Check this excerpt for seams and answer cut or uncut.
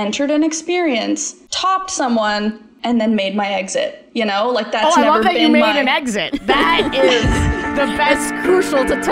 cut